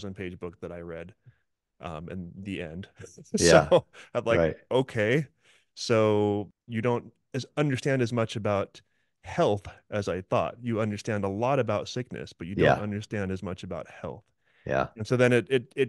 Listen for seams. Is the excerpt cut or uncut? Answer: cut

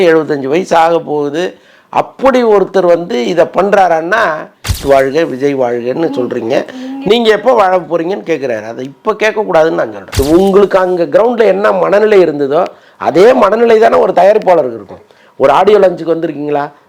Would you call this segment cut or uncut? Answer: cut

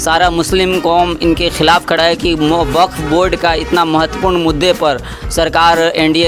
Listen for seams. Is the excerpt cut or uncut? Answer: uncut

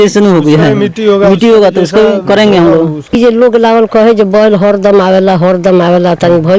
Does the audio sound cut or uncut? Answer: cut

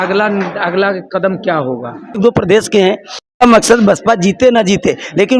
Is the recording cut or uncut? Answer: cut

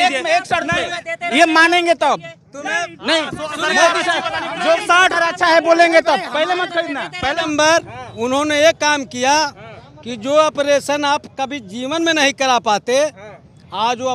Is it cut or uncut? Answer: cut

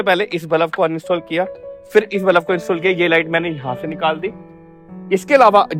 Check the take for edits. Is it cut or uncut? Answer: uncut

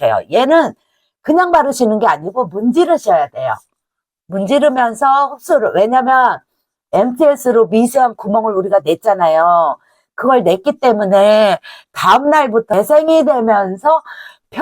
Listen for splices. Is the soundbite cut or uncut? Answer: cut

